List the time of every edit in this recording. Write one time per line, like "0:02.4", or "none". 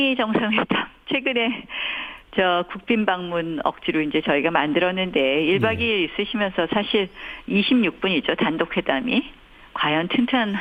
none